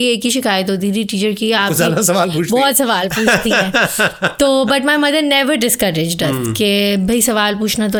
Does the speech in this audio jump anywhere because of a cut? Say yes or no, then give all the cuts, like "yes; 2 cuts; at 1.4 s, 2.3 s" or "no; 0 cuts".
no; 0 cuts